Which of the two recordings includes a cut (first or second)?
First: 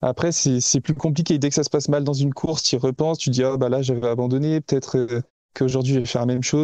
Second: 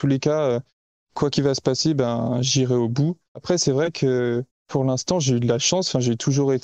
second